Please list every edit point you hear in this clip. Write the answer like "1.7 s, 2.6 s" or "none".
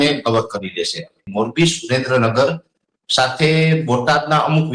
1.2 s